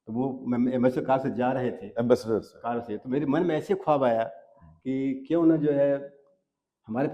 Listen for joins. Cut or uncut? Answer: uncut